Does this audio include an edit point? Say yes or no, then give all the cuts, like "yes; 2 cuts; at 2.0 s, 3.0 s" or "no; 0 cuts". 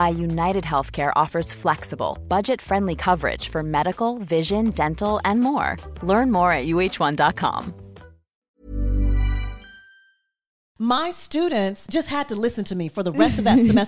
yes; 3 cuts; at 8.4 s, 10.6 s, 11.8 s